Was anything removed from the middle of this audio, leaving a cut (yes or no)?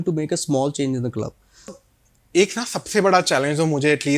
yes